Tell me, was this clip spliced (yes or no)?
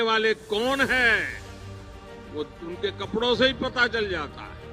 no